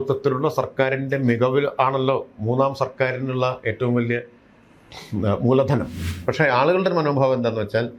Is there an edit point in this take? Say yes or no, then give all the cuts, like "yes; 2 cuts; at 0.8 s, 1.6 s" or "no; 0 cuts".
yes; 1 cut; at 6.0 s